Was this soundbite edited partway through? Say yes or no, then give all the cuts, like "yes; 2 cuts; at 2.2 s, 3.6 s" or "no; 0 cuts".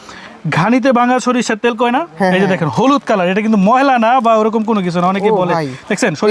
no; 0 cuts